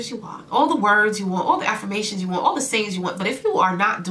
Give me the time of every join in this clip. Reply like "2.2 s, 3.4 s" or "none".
none

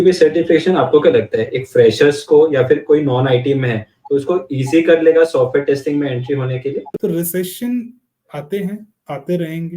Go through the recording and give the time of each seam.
6.9 s

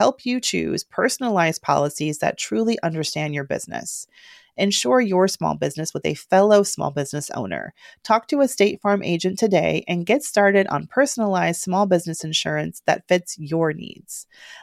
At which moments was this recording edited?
none

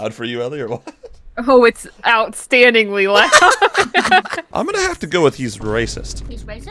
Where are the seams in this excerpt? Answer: 4.4 s

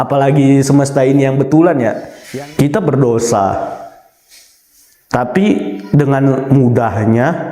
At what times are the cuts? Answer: 2.1 s

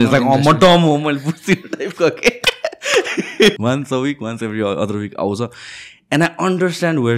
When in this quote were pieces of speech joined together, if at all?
3.6 s

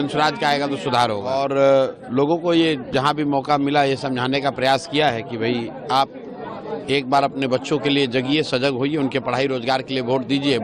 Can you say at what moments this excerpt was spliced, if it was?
1.3 s

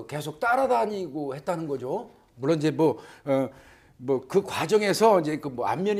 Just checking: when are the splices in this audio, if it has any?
none

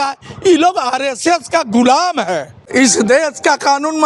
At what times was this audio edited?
2.5 s

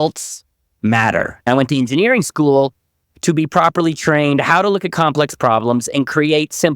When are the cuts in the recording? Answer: 1.5 s

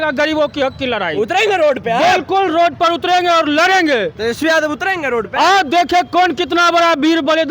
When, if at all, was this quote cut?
none

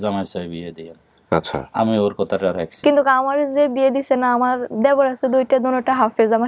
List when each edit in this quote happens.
none

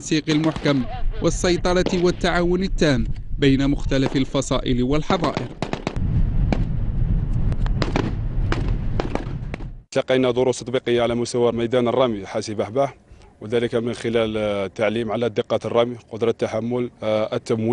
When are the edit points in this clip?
1.7 s

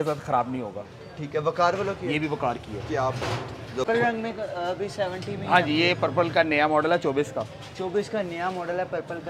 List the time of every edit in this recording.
3.9 s

